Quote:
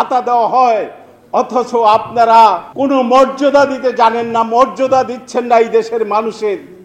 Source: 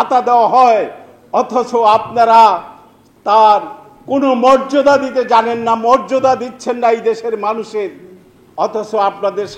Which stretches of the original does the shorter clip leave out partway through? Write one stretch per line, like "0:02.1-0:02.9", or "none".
0:02.7-0:04.0